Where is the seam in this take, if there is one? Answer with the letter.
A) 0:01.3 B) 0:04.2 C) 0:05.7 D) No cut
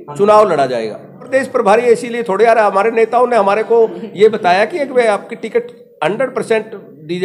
A